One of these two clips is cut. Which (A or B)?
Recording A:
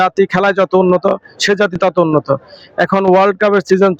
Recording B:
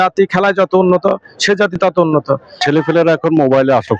B